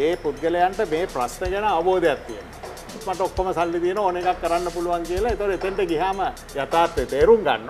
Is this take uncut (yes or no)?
no